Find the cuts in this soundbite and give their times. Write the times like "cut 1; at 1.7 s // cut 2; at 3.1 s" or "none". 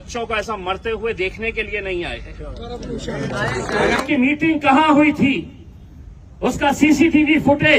cut 1; at 4.0 s